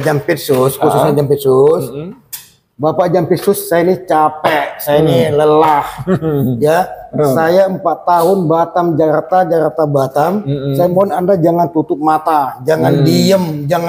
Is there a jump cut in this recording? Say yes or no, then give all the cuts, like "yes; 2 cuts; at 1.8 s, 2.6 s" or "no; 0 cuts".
no; 0 cuts